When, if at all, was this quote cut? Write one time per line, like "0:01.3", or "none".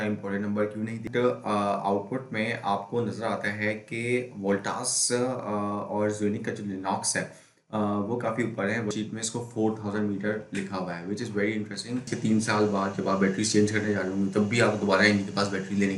0:01.0
0:08.9
0:12.1